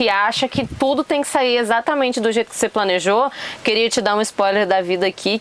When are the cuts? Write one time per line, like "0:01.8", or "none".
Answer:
none